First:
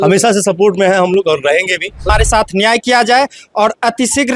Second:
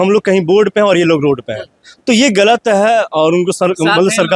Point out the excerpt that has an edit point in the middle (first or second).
first